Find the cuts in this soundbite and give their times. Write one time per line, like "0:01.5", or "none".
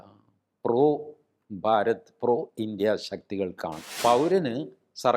0:04.0